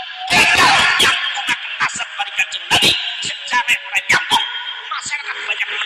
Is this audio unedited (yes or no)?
yes